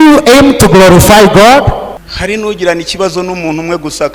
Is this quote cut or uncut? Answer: cut